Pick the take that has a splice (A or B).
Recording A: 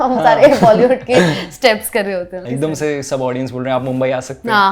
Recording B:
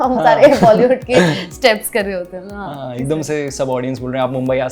A